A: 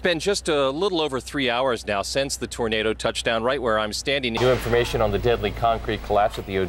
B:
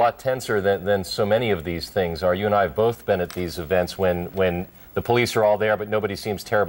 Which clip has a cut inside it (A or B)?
A